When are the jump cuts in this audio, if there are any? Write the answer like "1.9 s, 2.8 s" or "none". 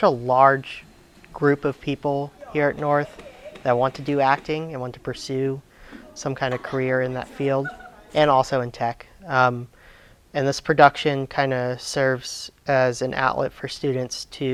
none